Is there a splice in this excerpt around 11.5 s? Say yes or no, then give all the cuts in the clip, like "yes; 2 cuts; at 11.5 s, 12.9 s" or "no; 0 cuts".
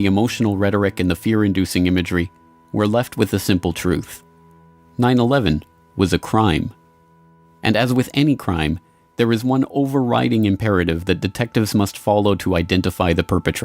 yes; 1 cut; at 11.5 s